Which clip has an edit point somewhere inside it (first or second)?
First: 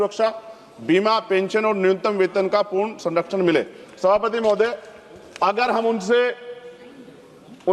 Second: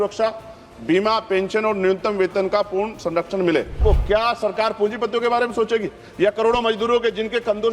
second